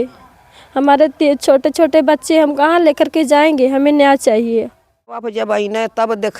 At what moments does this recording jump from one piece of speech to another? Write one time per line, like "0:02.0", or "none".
0:05.3